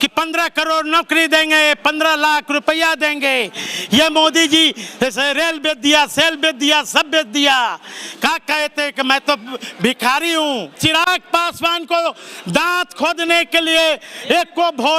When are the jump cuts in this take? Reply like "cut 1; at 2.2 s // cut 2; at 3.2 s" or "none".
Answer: cut 1; at 10.8 s